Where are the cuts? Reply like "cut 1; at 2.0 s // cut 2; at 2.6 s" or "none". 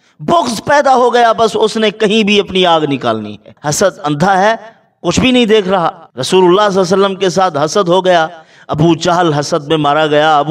cut 1; at 3.5 s // cut 2; at 6.1 s